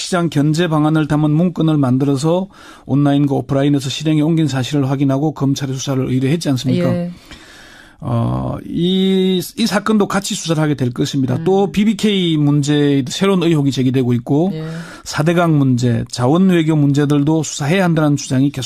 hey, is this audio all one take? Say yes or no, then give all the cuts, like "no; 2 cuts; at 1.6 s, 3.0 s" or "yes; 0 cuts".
no; 1 cut; at 13.6 s